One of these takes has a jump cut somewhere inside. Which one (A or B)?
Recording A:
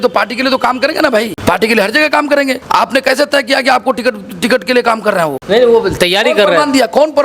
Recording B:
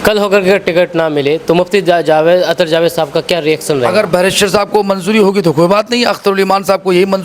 A